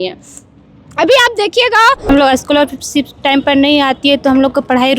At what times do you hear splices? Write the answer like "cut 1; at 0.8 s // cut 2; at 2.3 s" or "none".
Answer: cut 1; at 2.1 s